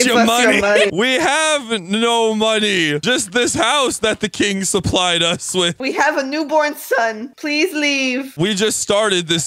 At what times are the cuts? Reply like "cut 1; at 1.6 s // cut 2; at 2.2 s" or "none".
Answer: cut 1; at 0.9 s